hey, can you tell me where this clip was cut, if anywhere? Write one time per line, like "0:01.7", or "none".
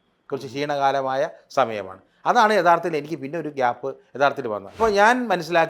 0:04.8